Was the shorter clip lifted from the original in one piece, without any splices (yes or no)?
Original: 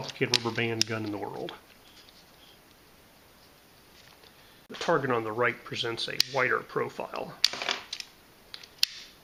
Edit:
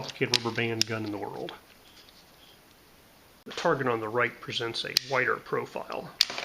no